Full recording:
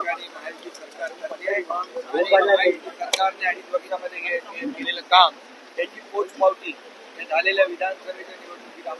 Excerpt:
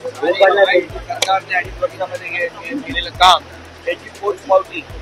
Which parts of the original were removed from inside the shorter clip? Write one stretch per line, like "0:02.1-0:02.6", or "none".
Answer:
none